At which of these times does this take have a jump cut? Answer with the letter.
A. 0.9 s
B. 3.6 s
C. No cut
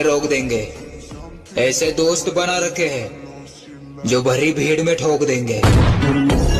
C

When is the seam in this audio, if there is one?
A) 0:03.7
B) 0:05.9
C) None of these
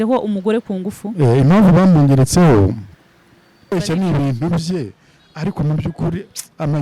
A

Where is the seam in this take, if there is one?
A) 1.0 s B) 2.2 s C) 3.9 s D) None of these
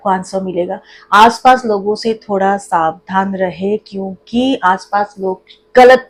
D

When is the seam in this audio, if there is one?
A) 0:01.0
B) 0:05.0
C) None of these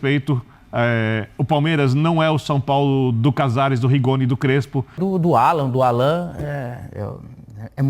B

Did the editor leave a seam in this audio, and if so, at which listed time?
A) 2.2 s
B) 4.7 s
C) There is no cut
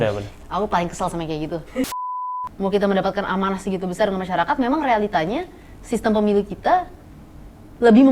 A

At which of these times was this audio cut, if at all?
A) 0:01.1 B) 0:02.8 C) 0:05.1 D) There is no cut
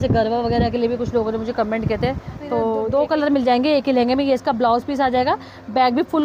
B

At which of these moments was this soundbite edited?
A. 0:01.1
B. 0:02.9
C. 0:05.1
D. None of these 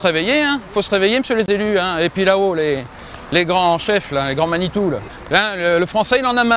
C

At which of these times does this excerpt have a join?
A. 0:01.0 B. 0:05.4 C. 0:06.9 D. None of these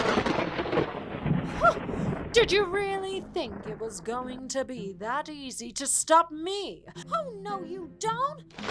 C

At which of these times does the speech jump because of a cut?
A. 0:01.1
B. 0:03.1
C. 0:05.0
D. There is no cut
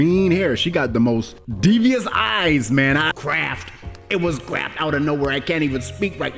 B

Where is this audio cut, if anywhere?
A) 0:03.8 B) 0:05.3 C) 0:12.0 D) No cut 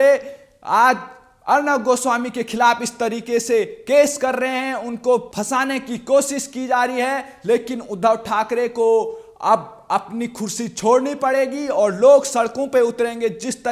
B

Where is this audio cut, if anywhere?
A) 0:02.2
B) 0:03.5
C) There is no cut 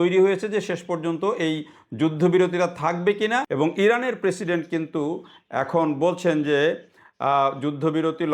B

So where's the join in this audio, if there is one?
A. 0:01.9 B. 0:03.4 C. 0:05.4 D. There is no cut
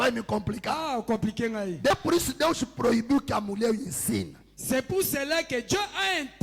A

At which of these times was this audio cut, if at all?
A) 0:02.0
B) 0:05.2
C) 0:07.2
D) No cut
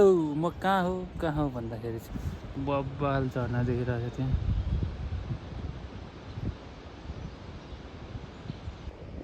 A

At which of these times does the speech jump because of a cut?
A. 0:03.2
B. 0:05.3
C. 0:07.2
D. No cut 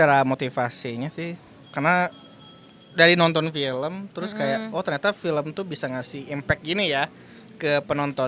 D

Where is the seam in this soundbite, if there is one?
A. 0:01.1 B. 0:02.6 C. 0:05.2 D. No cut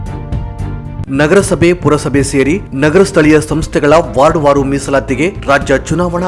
A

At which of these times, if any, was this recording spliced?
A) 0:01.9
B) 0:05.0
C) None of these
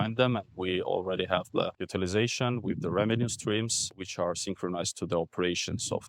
A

